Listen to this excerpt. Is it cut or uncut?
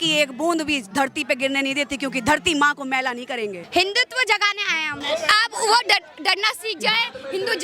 cut